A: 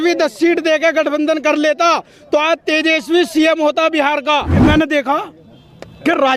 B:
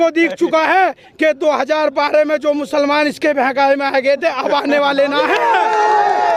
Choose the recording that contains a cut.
A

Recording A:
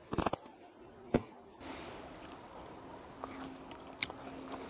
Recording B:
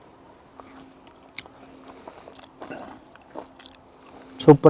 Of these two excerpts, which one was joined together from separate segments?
A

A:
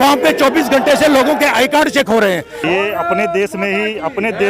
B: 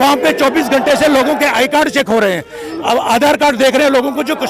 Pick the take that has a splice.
A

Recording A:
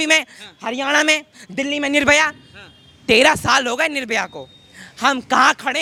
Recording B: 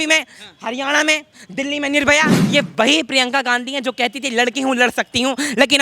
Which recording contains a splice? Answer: B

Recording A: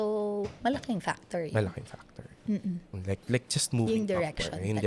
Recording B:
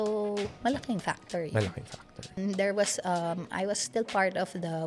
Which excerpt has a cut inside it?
B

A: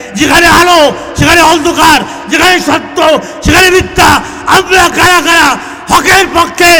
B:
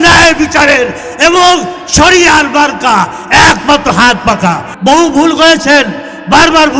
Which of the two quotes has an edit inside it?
B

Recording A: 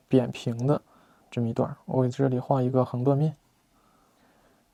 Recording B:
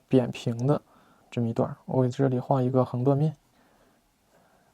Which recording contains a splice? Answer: B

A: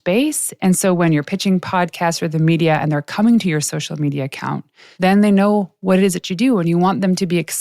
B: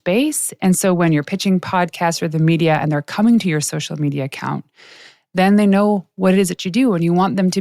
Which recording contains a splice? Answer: A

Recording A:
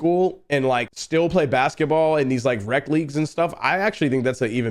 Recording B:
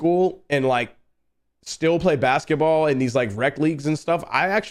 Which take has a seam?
A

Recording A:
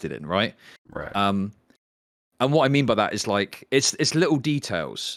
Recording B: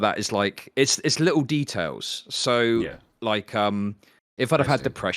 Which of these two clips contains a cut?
B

